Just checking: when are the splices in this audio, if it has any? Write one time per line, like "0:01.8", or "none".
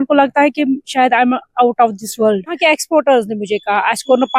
0:02.6